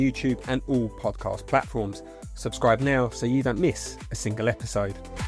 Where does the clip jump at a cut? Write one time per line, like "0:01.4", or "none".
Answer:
none

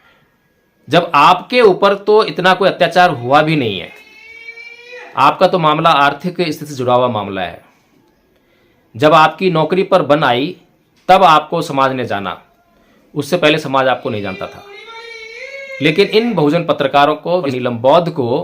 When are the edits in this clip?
0:17.5

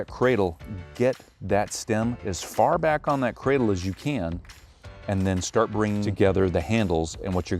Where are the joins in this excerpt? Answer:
0:06.1

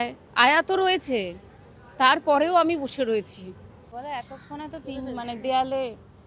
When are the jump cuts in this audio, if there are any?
0:03.9

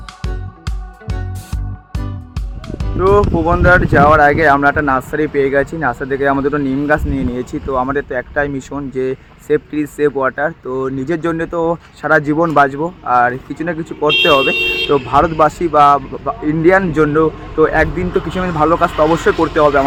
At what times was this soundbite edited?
none

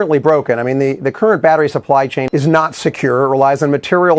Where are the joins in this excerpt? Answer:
0:02.2

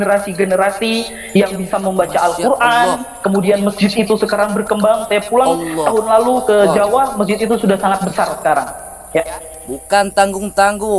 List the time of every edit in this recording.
none

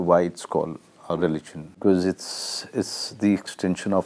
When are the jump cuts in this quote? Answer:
0:01.7

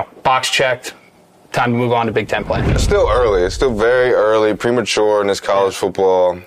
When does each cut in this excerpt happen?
0:02.8

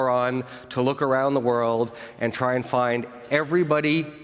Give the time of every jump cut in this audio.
none

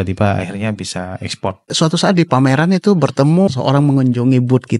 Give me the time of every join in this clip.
0:01.7
0:03.6

